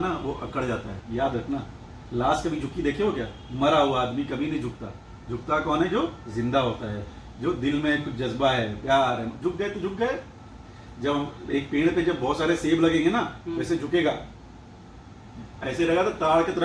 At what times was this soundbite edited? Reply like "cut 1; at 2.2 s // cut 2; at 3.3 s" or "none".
none